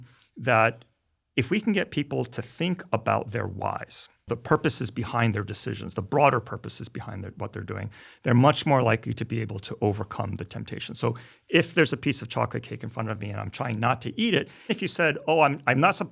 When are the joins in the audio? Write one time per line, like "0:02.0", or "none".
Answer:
0:04.2
0:14.7

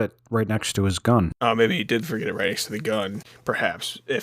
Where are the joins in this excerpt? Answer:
0:01.3
0:03.3

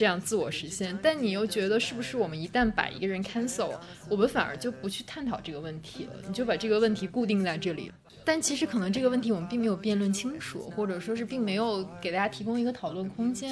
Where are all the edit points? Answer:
0:07.9

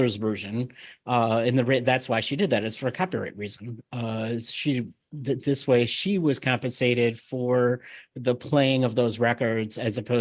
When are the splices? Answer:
none

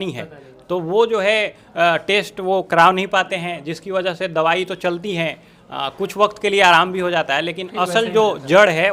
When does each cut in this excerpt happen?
none

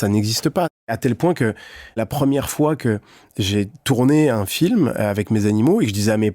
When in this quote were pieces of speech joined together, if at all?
0:00.9
0:02.0

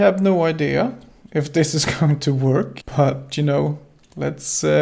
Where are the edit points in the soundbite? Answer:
0:02.8

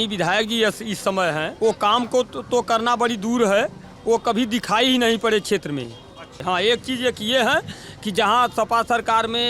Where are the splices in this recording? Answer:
0:01.5
0:06.3

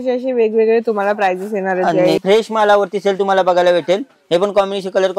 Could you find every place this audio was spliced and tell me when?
0:02.2

